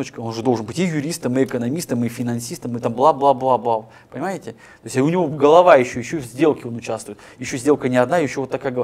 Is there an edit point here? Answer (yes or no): no